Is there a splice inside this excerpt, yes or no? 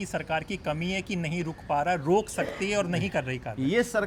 no